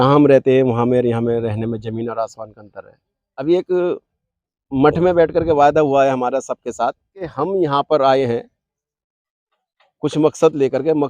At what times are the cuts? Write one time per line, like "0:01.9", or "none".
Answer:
0:03.4
0:07.2